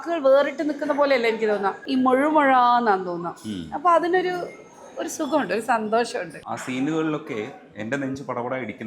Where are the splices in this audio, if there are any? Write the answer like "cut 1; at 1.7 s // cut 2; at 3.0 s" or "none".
cut 1; at 1.8 s // cut 2; at 6.3 s